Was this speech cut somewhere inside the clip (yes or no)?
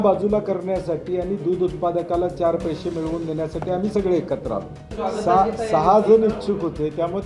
yes